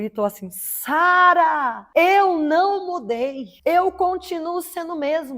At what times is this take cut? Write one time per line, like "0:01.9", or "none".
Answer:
0:01.8
0:03.5